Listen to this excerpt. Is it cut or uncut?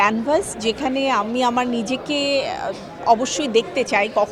uncut